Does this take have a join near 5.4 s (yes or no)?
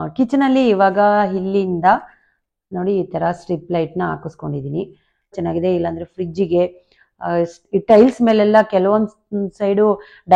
yes